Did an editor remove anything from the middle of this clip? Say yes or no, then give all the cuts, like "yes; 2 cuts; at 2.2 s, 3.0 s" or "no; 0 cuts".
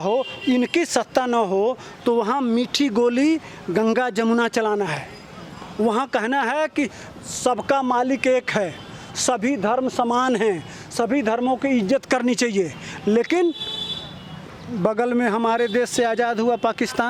no; 0 cuts